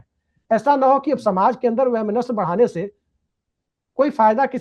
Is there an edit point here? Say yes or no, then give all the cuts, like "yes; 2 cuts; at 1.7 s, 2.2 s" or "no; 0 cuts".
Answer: no; 0 cuts